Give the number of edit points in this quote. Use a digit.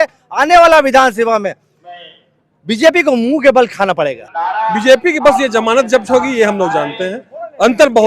1